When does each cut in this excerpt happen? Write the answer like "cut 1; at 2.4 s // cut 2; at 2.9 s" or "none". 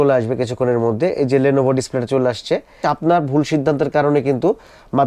cut 1; at 2.8 s